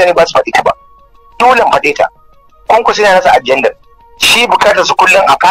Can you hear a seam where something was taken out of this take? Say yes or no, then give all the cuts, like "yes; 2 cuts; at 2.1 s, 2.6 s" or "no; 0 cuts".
no; 0 cuts